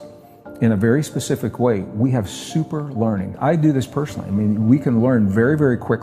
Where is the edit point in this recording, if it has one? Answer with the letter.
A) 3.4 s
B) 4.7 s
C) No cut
A